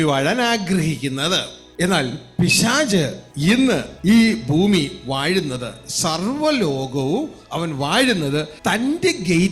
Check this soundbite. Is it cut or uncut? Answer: cut